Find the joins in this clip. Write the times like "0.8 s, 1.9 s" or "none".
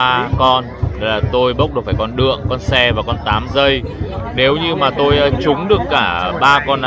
none

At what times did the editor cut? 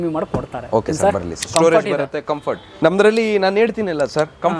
1.5 s, 2.6 s

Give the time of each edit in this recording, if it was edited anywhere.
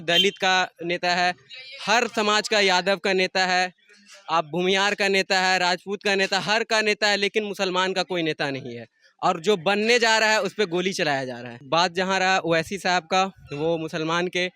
11.5 s

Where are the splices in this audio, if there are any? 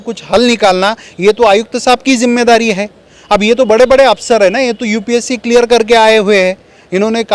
none

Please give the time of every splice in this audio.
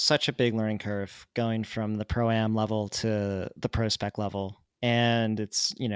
none

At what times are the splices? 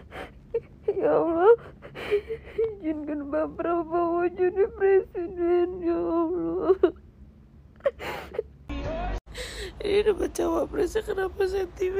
9.1 s

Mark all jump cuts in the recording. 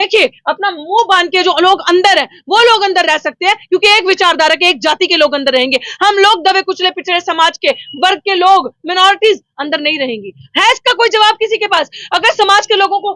none

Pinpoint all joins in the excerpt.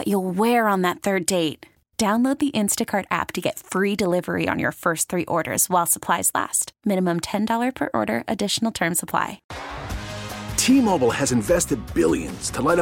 9.5 s

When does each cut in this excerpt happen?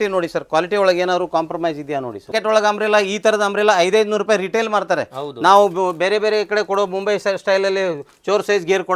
2.3 s

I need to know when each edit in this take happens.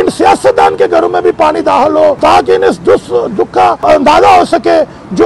2.2 s, 3.8 s

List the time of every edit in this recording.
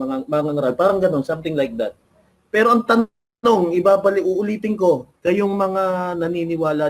5.1 s

